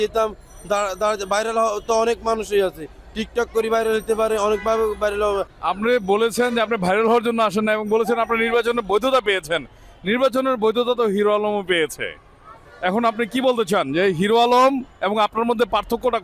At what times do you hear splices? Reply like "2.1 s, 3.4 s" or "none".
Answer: 5.5 s